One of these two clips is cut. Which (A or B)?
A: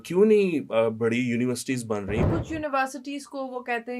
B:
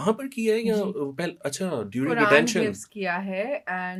A